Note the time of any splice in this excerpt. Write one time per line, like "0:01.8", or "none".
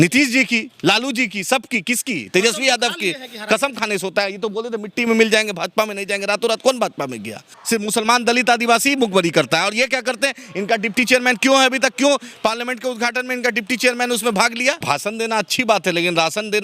0:07.5
0:14.8